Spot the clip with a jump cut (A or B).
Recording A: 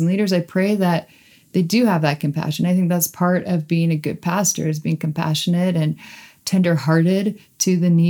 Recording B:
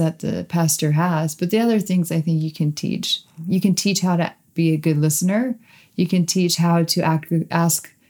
B